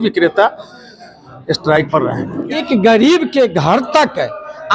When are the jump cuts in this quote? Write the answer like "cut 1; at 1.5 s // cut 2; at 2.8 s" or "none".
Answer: cut 1; at 2.6 s